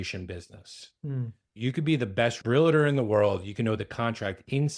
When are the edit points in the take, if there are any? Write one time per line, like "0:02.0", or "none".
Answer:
0:01.4
0:02.4